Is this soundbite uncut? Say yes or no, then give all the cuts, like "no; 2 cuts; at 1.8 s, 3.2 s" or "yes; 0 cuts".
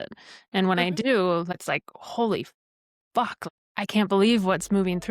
no; 2 cuts; at 1.5 s, 3.4 s